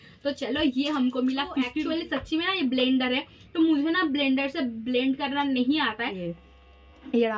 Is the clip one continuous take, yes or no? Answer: no